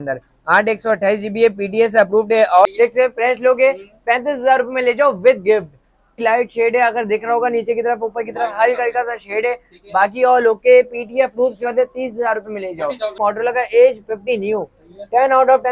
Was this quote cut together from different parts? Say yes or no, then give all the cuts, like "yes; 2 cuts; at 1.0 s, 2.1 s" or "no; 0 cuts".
yes; 3 cuts; at 2.7 s, 6.1 s, 13.2 s